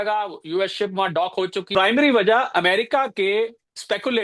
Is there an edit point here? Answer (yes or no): yes